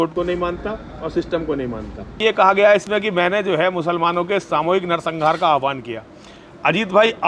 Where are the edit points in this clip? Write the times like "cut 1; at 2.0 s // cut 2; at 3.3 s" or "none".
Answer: cut 1; at 2.2 s